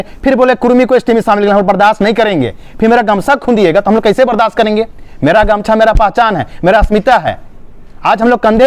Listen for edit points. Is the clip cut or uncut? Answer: uncut